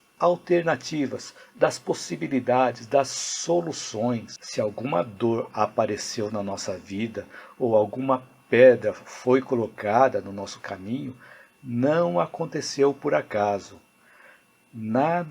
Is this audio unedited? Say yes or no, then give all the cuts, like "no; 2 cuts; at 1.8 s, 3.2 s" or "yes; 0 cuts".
no; 1 cut; at 4.4 s